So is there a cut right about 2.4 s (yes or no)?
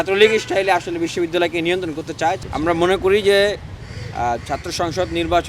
yes